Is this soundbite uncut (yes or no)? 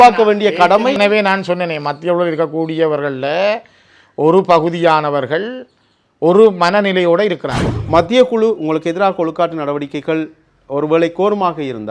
no